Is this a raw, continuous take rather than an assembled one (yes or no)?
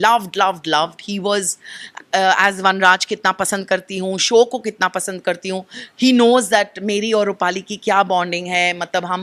no